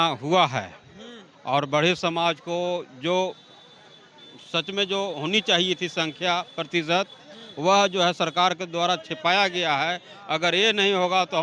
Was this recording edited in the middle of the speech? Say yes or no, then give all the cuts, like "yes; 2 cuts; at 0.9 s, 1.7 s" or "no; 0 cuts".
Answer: no; 0 cuts